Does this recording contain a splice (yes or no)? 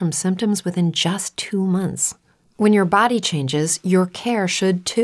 yes